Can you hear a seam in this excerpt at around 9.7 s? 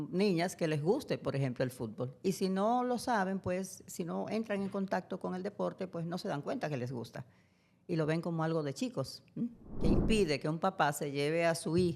yes; 1 cut; at 9.7 s

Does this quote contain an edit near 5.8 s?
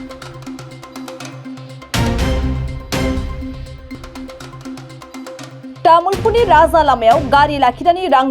yes; 2 cuts; at 4.0 s, 5.8 s

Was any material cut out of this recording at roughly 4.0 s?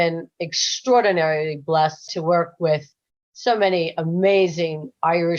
no; 1 cut; at 2.1 s

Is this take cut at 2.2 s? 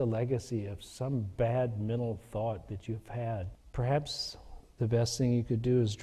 no; 1 cut; at 3.6 s

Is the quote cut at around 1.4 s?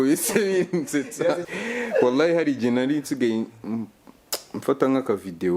yes; 1 cut; at 1.4 s

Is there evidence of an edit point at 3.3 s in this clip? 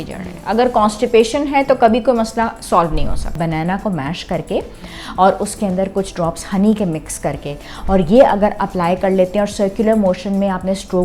yes; 2 cuts; at 3.3 s, 8.6 s

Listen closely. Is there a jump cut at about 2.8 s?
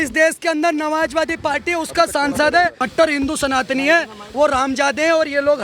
yes; 1 cut; at 2.8 s

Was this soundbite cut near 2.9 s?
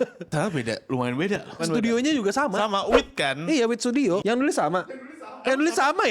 no; 2 cuts; at 1.6 s, 4.2 s

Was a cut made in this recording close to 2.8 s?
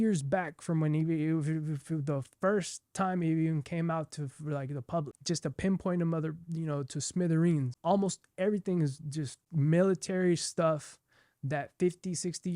no; 3 cuts; at 5.1 s, 7.7 s, 9.4 s

